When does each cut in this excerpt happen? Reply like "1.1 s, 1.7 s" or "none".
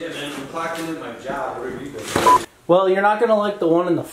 2.5 s

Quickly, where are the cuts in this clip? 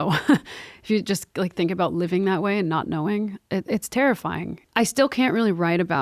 4.5 s

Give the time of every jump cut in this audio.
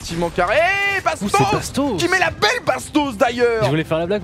none

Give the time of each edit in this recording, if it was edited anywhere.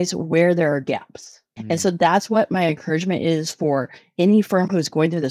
1.5 s

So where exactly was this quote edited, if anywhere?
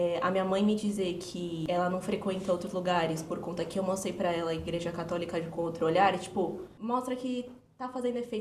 1.6 s, 6.7 s

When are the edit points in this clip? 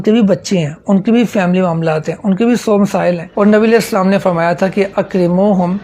3.3 s

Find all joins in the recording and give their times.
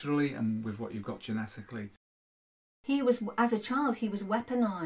2.6 s

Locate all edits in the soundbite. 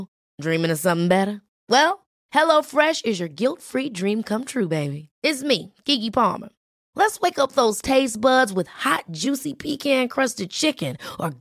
none

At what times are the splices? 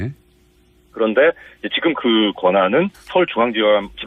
none

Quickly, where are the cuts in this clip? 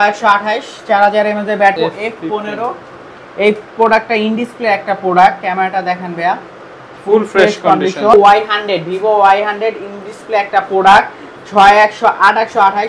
1.8 s, 8.1 s

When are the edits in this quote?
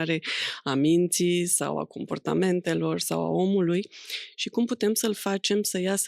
none

